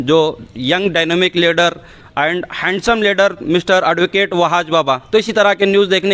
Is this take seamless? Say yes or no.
yes